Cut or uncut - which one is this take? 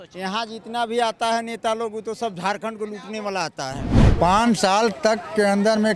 cut